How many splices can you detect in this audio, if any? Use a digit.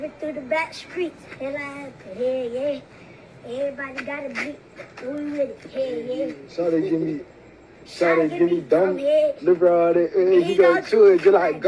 2